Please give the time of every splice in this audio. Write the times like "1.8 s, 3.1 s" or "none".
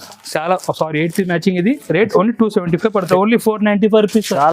3.1 s